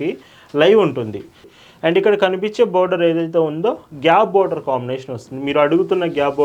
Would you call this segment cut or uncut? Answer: cut